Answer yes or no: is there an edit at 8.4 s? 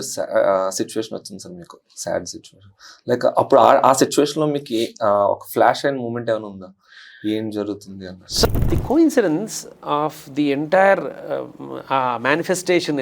yes